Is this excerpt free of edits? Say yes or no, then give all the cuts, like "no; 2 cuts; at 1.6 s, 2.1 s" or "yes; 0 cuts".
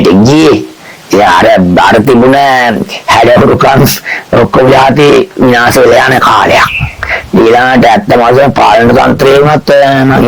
yes; 0 cuts